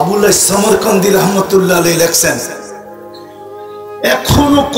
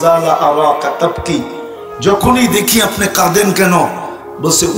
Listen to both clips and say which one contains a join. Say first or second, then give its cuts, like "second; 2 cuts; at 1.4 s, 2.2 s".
first; 2 cuts; at 2.5 s, 4.0 s